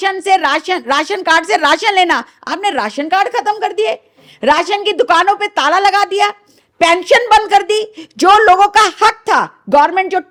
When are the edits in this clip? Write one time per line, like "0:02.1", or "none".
none